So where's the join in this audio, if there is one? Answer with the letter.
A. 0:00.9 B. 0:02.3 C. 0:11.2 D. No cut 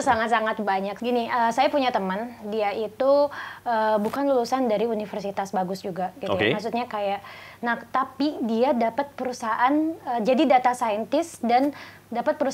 A